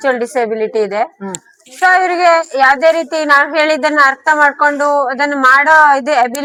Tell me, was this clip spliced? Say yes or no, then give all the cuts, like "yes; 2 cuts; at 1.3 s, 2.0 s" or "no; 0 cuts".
no; 0 cuts